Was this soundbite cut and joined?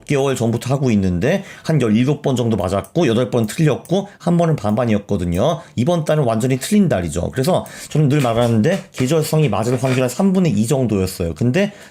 no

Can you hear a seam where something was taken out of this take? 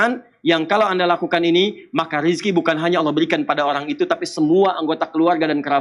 no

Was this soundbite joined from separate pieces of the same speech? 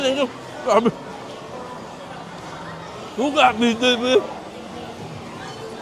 no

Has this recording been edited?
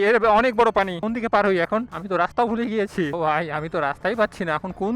yes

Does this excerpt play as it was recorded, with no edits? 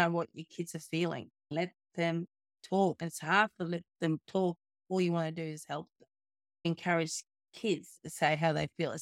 no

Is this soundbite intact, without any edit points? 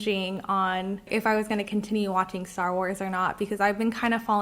no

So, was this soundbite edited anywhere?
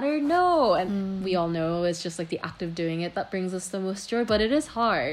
yes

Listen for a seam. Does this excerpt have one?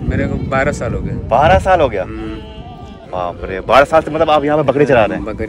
no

